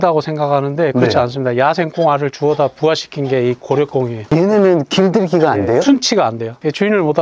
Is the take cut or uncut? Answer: uncut